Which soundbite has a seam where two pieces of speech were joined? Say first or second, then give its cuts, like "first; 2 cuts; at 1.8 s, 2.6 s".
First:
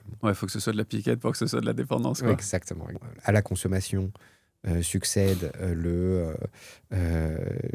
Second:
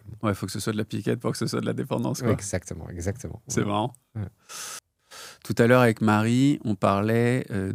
first; 1 cut; at 3.0 s